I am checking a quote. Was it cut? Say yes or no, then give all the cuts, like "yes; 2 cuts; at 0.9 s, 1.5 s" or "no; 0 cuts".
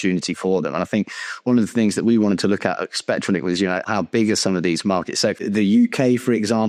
yes; 2 cuts; at 3.8 s, 5.5 s